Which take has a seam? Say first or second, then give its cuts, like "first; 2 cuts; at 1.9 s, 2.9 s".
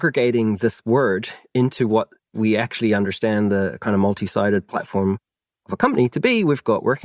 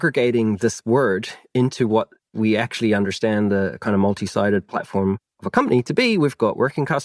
second; 1 cut; at 5.3 s